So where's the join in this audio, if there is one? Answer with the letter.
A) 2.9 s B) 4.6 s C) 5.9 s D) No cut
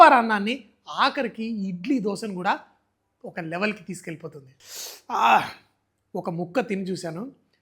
B